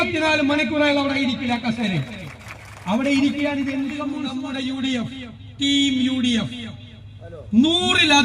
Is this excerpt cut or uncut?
cut